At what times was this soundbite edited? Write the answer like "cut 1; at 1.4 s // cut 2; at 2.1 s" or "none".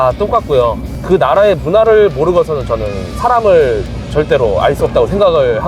cut 1; at 0.9 s